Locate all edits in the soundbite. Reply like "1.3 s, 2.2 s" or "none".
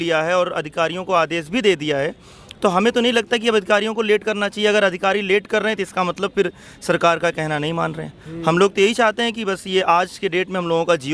none